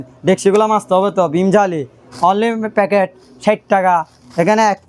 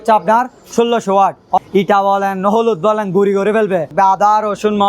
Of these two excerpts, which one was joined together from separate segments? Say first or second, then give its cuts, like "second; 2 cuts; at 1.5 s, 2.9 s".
second; 2 cuts; at 1.6 s, 3.9 s